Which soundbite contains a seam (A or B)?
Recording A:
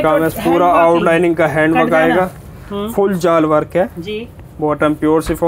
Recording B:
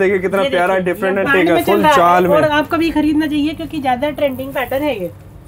B